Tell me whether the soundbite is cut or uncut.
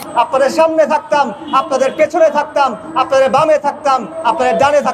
uncut